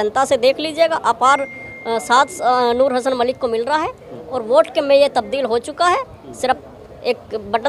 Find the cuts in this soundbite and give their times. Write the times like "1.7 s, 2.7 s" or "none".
none